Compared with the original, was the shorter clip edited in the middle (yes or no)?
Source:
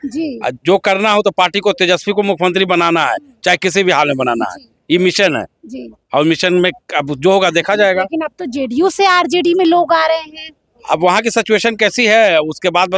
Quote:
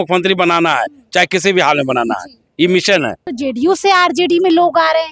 yes